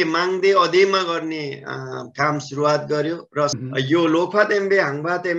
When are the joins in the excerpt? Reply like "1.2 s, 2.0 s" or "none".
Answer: 3.5 s

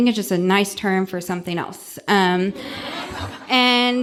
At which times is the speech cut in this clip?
none

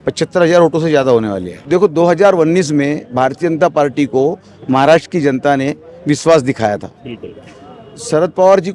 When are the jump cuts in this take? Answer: 1.6 s

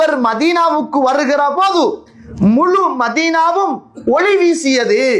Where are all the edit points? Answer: none

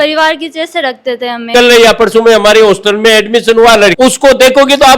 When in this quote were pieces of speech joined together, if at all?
1.5 s, 3.9 s

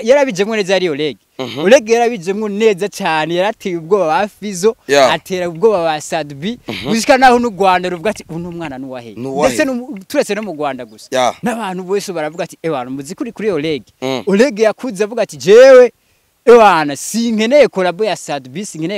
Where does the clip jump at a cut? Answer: none

